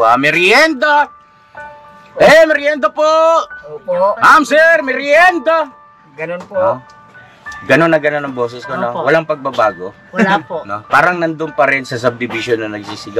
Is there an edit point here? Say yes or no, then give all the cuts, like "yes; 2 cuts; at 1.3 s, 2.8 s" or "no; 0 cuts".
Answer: no; 0 cuts